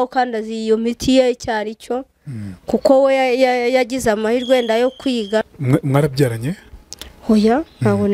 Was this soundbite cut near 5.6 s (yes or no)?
yes